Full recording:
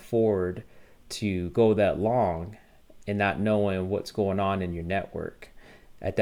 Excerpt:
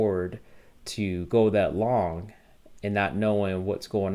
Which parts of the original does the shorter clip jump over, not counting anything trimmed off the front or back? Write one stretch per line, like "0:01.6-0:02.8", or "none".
none